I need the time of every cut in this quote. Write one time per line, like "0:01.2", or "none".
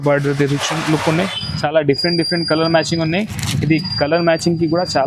0:01.3